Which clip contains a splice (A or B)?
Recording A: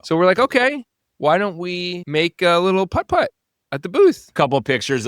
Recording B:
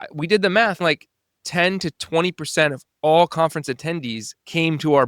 A